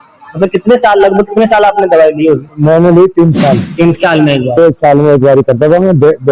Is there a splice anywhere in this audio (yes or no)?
yes